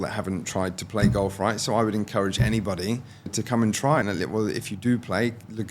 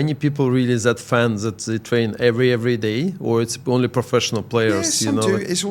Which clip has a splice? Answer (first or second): first